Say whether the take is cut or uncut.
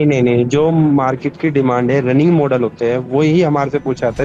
uncut